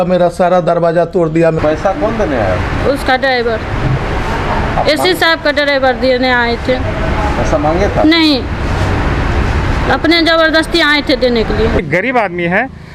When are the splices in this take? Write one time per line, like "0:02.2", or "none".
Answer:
0:01.6
0:11.8